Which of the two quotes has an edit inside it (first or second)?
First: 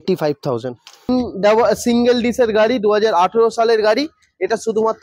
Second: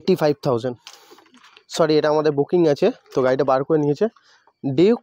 first